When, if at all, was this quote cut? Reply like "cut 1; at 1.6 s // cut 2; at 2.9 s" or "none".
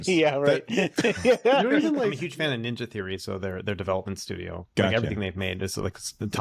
cut 1; at 2.2 s